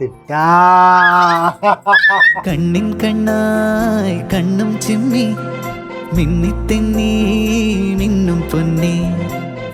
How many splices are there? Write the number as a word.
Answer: zero